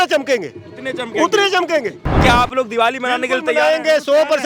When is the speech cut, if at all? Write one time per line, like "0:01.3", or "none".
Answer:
0:02.2